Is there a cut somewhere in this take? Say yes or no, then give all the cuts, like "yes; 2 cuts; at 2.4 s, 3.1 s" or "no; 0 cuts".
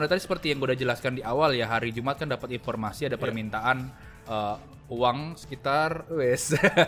no; 0 cuts